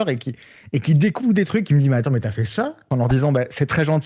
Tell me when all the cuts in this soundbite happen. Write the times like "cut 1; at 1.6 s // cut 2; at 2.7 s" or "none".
cut 1; at 2.9 s